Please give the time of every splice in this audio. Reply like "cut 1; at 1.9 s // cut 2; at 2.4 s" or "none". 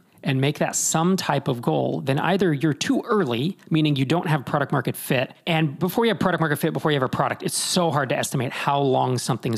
cut 1; at 5.8 s